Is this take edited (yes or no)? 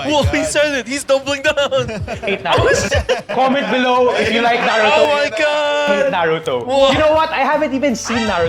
no